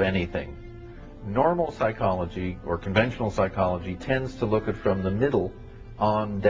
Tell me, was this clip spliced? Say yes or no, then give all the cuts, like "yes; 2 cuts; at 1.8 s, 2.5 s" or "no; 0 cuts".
no; 0 cuts